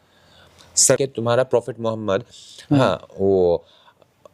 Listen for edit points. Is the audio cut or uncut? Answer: cut